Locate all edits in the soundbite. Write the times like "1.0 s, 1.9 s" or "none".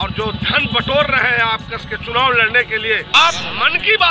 3.1 s